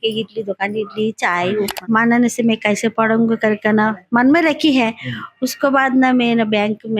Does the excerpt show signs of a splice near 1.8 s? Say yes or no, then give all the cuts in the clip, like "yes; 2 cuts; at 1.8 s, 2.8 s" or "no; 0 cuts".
yes; 1 cut; at 1.8 s